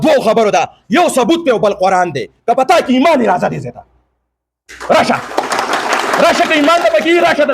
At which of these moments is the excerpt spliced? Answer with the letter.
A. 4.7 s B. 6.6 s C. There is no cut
B